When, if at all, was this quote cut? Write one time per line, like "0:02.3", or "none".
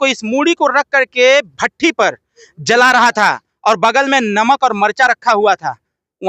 none